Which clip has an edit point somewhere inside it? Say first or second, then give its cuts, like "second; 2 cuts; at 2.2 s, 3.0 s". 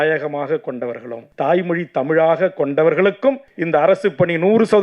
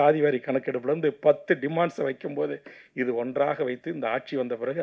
first; 2 cuts; at 1.2 s, 3.5 s